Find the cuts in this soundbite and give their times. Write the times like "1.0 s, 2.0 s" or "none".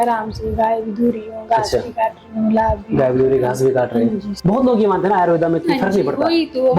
4.4 s